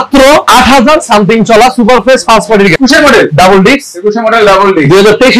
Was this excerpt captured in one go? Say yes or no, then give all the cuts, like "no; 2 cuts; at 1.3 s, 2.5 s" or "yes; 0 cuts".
no; 1 cut; at 2.8 s